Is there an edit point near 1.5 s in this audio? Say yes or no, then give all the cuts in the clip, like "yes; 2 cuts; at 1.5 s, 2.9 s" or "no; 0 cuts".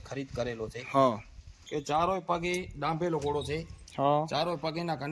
yes; 1 cut; at 1.5 s